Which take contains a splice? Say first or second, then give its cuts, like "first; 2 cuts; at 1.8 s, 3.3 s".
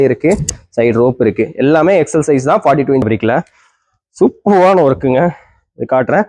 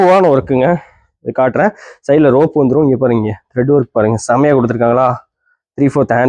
first; 1 cut; at 3.0 s